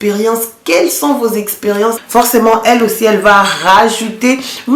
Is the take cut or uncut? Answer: cut